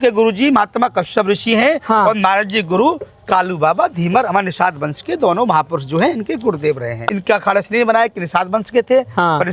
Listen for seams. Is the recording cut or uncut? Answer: cut